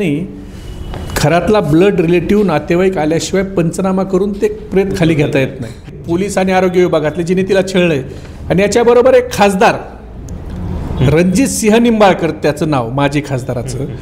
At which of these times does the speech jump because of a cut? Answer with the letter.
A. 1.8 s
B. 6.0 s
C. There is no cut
B